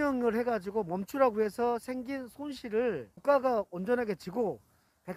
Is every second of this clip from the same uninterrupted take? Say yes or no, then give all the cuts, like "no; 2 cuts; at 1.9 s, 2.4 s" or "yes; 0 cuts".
yes; 0 cuts